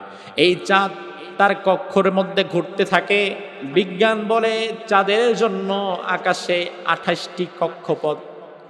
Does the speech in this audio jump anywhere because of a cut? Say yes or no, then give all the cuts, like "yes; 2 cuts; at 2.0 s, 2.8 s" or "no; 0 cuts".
yes; 1 cut; at 3.5 s